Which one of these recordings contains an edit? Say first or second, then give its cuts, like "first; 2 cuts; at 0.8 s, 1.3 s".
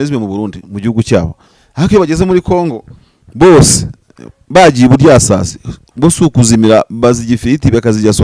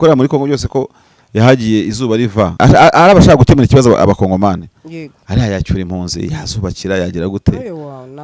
second; 1 cut; at 2.5 s